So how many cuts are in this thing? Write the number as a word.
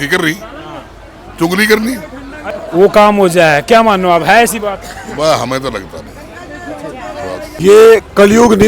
two